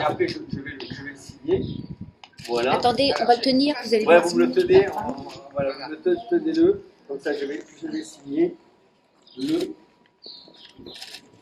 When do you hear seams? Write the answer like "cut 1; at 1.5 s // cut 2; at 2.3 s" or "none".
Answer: none